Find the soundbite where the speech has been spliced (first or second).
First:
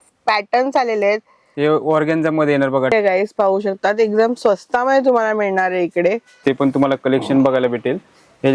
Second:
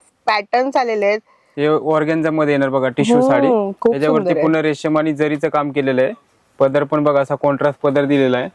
first